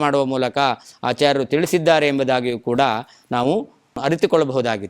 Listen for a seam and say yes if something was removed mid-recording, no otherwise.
yes